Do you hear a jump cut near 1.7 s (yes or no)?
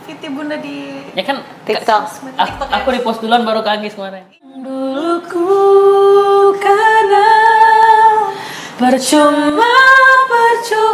no